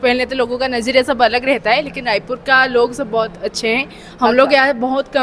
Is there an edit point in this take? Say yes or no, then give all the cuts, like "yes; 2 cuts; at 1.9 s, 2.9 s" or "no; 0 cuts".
no; 0 cuts